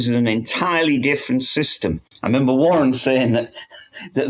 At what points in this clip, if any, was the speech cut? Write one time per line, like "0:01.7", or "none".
none